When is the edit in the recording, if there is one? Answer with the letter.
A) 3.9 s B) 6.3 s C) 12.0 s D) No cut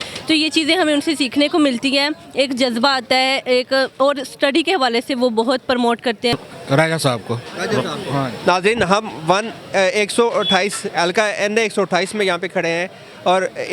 B